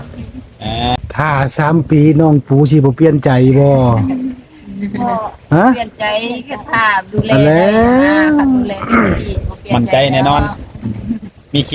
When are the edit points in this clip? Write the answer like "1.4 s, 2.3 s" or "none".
1.0 s